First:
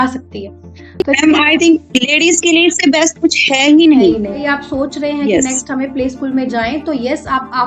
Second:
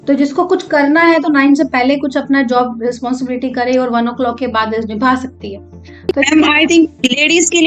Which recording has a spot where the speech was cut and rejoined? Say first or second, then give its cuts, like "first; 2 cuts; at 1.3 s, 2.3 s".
first; 1 cut; at 4.4 s